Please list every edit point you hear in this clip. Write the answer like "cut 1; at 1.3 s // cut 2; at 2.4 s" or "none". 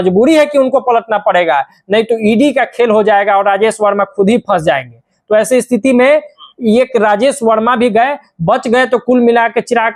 none